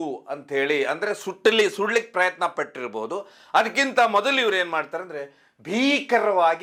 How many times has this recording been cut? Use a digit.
0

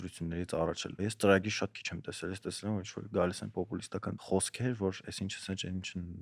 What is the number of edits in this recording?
2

